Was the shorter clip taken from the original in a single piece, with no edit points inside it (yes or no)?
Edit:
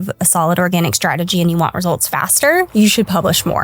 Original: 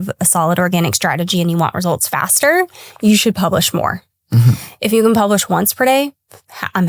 no